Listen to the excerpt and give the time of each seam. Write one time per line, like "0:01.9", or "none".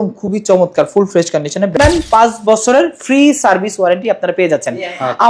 0:01.7